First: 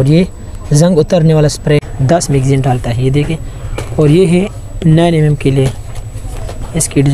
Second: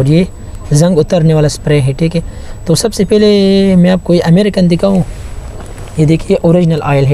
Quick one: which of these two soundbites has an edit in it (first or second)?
first